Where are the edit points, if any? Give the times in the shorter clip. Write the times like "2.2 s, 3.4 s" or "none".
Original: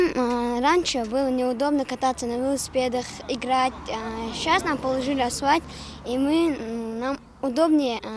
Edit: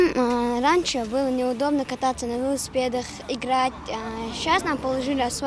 none